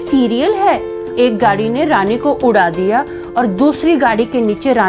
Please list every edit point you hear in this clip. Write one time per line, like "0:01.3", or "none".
0:01.1